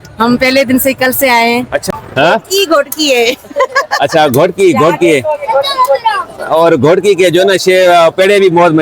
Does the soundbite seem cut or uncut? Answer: cut